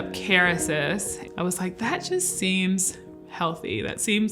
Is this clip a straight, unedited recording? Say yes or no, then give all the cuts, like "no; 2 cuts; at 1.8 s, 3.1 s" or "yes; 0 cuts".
no; 1 cut; at 1.2 s